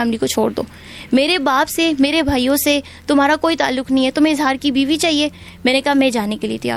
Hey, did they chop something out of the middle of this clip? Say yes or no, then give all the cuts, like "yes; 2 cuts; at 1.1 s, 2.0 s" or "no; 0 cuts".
no; 0 cuts